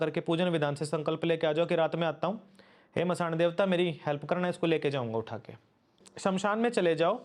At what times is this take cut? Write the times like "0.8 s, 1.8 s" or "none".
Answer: 6.0 s